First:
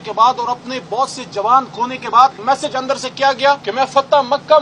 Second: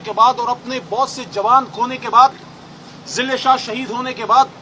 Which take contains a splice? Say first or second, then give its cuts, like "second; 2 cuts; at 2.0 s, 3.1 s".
first; 2 cuts; at 2.4 s, 3.7 s